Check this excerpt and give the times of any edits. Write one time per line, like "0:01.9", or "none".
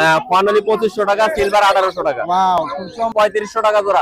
0:03.1